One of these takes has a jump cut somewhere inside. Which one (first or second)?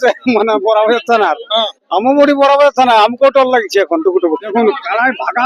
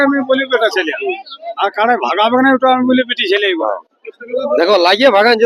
first